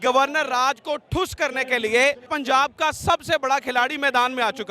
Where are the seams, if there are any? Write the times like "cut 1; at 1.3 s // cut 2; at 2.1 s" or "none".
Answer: cut 1; at 2.3 s